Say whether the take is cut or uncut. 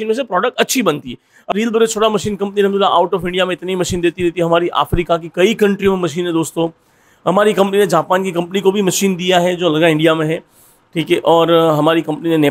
cut